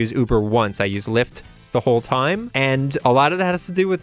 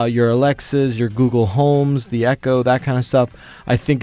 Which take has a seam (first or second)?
first